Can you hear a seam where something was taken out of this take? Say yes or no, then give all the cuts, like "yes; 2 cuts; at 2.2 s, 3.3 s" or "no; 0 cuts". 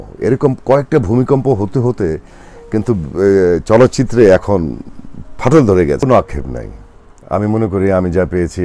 no; 0 cuts